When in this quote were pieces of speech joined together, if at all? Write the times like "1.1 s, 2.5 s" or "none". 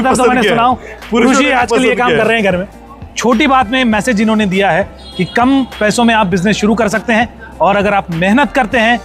2.7 s